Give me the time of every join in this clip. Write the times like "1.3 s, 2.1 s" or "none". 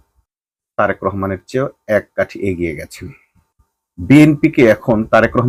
none